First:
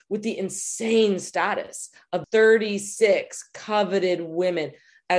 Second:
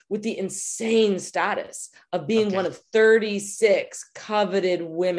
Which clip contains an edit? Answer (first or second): first